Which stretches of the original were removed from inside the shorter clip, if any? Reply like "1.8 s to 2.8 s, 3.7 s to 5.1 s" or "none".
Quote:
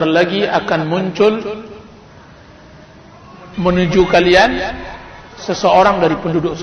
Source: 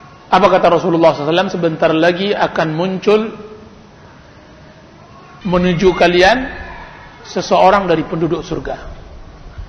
none